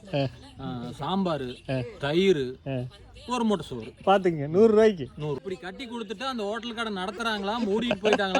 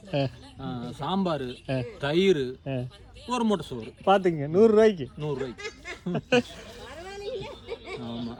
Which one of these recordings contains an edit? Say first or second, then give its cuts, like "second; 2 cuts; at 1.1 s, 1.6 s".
first; 1 cut; at 5.4 s